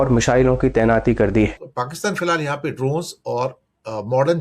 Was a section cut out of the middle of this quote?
yes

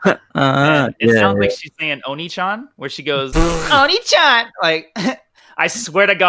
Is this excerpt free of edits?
yes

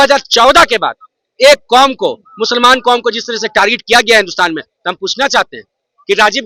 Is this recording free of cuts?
yes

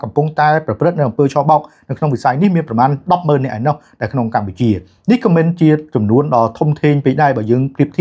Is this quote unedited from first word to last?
yes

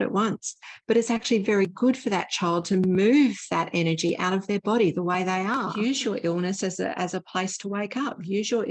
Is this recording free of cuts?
no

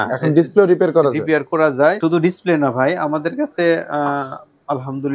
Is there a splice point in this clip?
yes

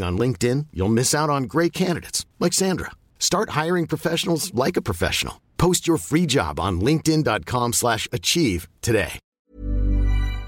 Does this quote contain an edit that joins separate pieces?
yes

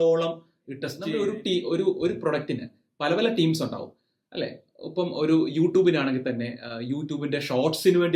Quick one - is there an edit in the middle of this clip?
yes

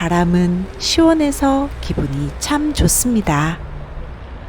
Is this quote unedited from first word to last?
no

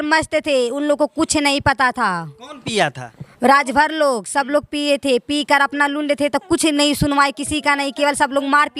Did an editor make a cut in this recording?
no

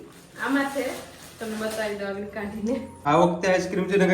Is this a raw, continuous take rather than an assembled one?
no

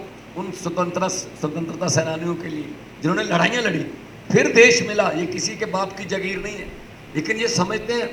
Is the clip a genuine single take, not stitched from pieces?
yes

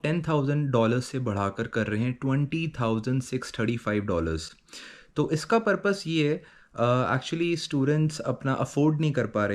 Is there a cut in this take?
no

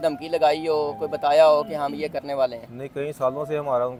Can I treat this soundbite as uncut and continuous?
yes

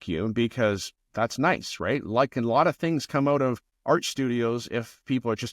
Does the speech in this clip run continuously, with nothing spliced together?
no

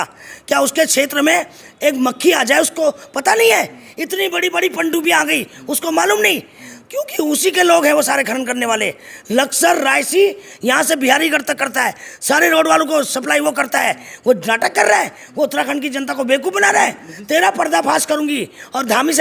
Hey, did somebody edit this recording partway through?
no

